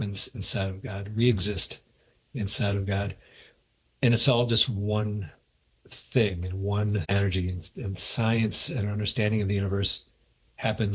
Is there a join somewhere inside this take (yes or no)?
no